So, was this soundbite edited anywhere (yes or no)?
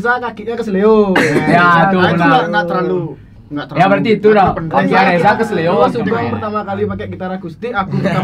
no